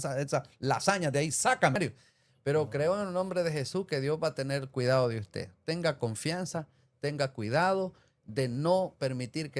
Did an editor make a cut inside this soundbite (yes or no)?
yes